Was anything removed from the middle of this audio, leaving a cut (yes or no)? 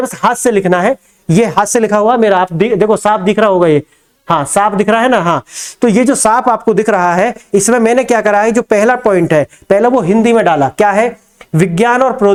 no